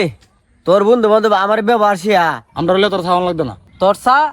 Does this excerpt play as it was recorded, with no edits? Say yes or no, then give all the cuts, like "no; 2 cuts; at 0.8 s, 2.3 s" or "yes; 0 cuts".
no; 1 cut; at 2.5 s